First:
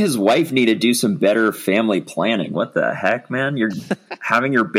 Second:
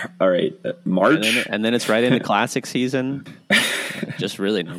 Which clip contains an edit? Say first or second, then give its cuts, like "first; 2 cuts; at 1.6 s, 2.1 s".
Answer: second; 1 cut; at 3.6 s